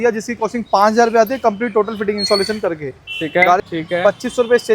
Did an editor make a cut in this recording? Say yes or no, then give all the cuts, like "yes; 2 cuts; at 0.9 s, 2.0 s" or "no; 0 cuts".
yes; 1 cut; at 3.6 s